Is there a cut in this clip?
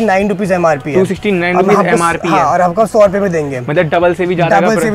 no; 0 cuts

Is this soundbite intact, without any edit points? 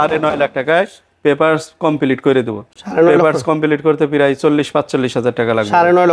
yes; 0 cuts

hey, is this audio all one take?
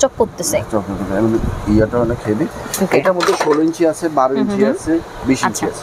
yes; 0 cuts

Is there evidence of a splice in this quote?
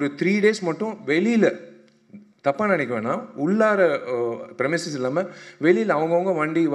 no; 0 cuts

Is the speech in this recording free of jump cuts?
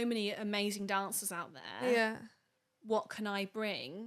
yes; 0 cuts

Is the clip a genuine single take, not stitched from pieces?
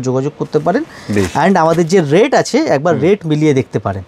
yes; 0 cuts

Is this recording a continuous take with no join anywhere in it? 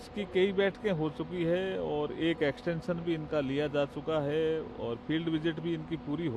yes; 0 cuts

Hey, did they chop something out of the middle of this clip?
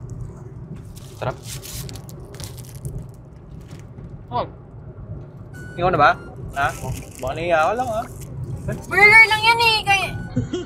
no; 0 cuts

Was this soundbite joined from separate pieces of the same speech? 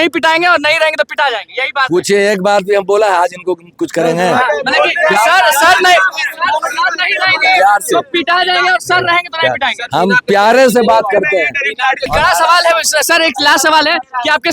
yes; 1 cut; at 12.1 s

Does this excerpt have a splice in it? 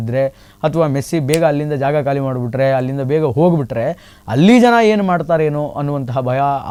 no; 0 cuts

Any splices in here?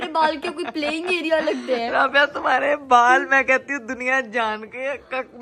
no; 0 cuts

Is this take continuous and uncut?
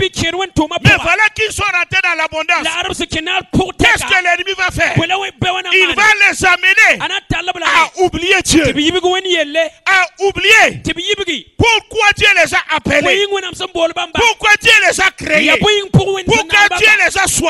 yes; 0 cuts

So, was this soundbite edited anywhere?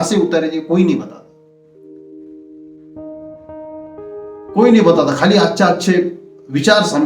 yes; 3 cuts; at 1.2 s, 2.8 s, 4.5 s

